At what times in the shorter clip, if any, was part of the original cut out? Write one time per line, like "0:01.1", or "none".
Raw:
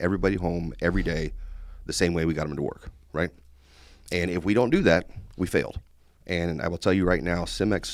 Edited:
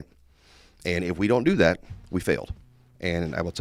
none